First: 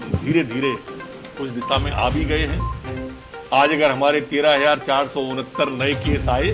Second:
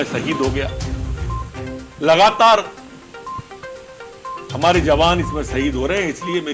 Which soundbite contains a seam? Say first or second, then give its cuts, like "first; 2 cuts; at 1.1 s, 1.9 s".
second; 4 cuts; at 0.7 s, 1.9 s, 3.0 s, 4.5 s